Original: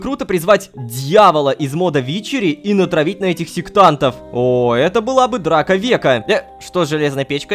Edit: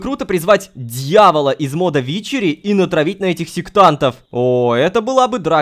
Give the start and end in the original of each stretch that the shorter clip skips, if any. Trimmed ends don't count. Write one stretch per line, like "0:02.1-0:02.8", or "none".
none